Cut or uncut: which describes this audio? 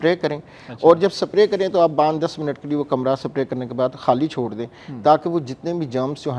uncut